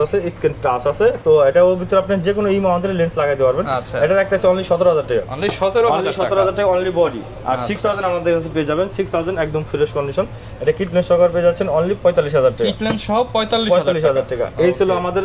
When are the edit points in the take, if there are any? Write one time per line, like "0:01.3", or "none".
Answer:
none